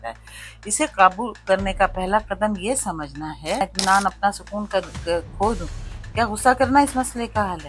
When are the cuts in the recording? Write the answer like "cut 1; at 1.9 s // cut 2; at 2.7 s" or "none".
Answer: cut 1; at 3.6 s